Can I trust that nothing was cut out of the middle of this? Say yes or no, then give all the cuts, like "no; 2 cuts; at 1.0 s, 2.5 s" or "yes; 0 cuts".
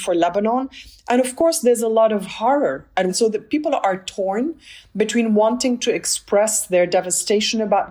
no; 1 cut; at 3.1 s